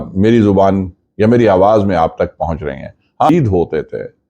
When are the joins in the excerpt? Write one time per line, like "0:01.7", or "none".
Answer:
0:03.3